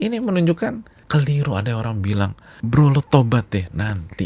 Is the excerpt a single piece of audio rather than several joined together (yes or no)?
no